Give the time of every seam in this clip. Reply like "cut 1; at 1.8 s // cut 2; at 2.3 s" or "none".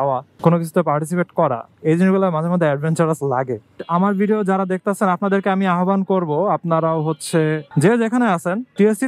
cut 1; at 3.7 s